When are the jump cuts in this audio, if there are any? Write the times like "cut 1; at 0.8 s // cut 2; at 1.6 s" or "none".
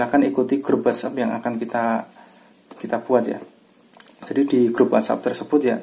none